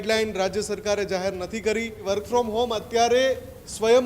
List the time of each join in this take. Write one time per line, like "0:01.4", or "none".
0:02.0